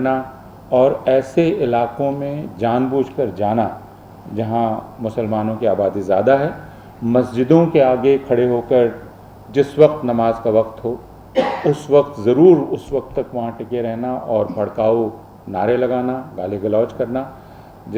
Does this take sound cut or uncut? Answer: uncut